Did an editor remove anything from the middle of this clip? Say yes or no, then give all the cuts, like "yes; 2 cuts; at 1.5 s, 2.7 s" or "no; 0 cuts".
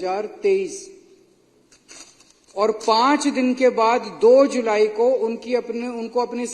no; 0 cuts